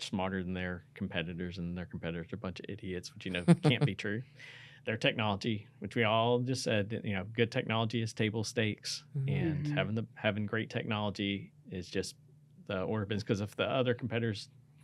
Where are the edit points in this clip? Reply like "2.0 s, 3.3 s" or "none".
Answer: none